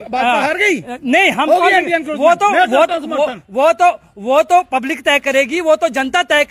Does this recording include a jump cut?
no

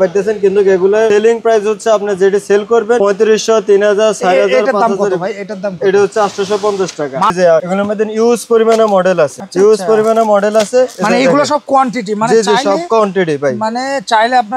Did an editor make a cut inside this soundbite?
yes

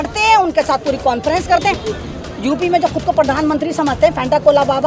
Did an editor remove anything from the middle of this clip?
yes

